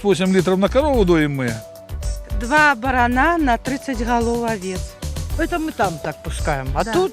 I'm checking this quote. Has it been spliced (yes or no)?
yes